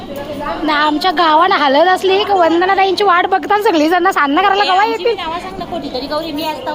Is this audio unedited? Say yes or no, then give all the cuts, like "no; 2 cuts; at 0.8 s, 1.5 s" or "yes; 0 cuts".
yes; 0 cuts